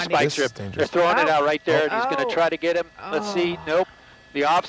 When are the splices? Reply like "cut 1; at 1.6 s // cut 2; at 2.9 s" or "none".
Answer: none